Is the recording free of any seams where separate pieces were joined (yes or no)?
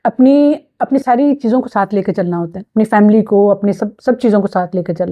yes